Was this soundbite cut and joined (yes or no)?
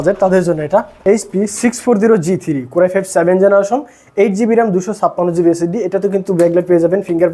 yes